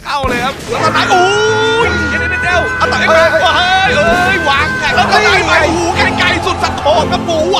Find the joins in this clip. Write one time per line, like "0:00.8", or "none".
none